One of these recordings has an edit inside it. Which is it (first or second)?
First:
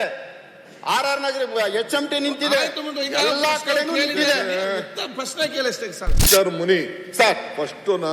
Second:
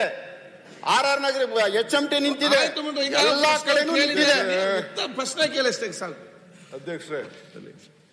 first